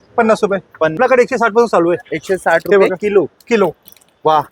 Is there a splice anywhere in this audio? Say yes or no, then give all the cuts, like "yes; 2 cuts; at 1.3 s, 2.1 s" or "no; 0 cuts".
yes; 1 cut; at 1.0 s